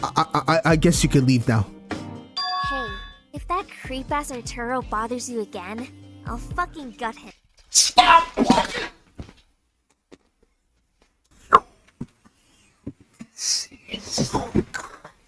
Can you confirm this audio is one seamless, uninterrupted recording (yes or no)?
yes